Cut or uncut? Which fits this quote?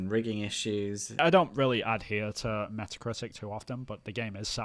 cut